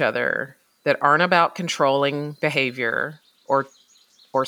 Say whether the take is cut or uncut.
uncut